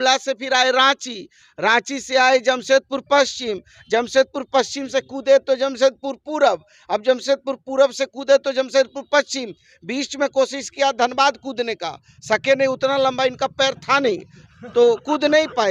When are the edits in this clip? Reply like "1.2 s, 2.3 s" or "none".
none